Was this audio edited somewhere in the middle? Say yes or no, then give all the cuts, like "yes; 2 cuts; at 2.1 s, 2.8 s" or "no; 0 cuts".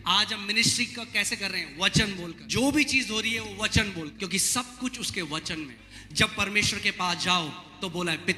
yes; 3 cuts; at 2.4 s, 4.1 s, 5.8 s